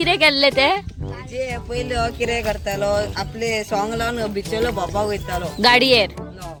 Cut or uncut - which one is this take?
uncut